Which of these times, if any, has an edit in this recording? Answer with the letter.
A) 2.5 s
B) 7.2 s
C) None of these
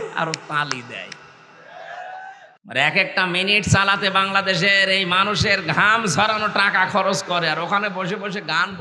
A